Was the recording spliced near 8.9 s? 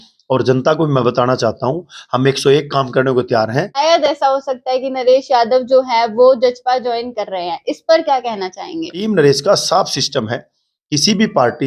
yes; 2 cuts; at 3.7 s, 8.9 s

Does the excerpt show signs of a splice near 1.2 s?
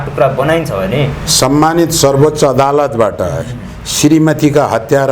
yes; 1 cut; at 1.2 s

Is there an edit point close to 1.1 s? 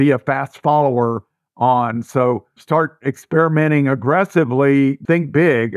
no; 2 cuts; at 2.5 s, 5.0 s

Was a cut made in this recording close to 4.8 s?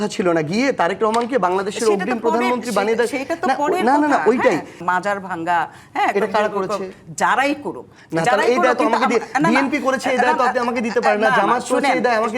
yes; 1 cut; at 4.8 s

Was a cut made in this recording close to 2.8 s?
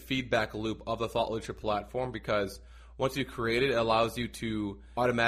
no; 0 cuts

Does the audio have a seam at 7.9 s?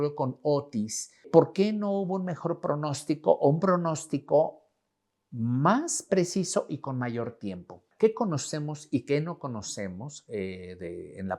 yes; 2 cuts; at 1.3 s, 7.9 s

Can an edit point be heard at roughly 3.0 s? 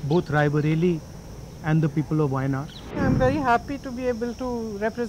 yes; 1 cut; at 3.0 s

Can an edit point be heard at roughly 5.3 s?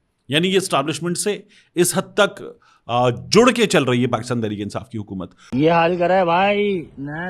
yes; 1 cut; at 5.3 s

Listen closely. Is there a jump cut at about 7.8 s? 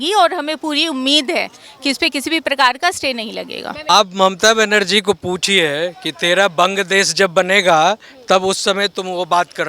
no; 1 cut; at 3.9 s

